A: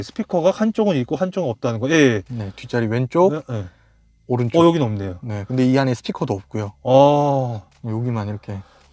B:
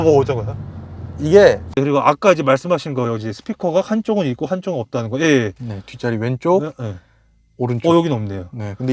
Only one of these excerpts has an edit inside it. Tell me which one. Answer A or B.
B